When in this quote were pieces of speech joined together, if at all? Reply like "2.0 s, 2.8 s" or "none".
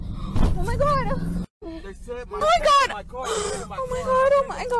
1.4 s